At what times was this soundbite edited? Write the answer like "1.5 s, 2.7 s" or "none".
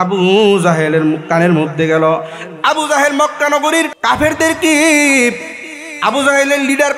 3.9 s